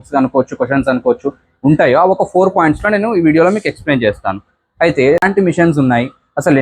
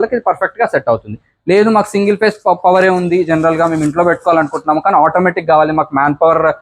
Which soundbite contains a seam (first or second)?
first